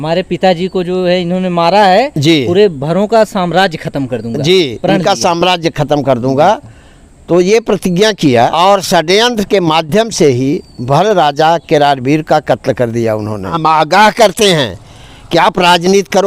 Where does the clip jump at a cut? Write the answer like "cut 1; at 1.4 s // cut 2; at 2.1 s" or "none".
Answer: cut 1; at 8.5 s // cut 2; at 13.5 s